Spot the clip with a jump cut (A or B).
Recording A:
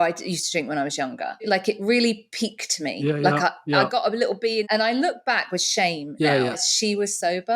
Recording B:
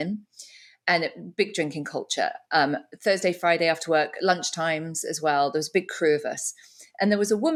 A